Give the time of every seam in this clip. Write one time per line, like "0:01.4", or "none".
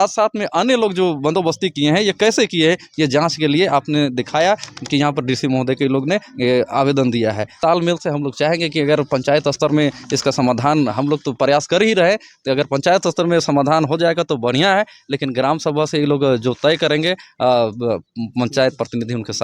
0:07.5

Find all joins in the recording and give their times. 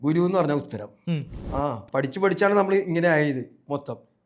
0:01.3

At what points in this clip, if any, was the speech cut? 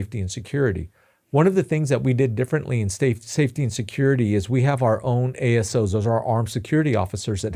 none

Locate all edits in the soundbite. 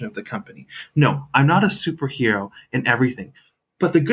none

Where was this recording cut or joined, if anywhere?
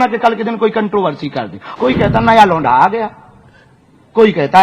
0:01.6

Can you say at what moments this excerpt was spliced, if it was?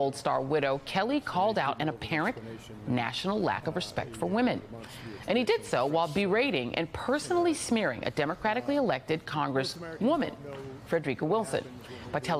0:06.7

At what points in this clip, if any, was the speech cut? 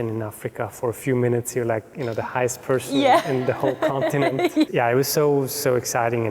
0:04.7

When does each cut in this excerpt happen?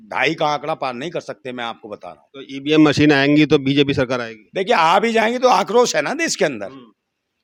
none

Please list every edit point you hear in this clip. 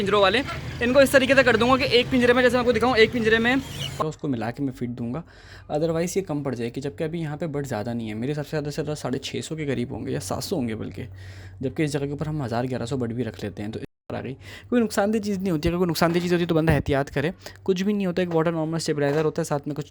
0:03.9
0:14.0

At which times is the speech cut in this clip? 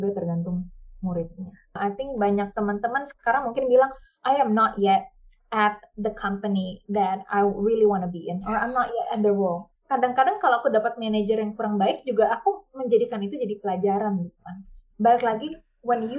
0:01.7
0:09.7

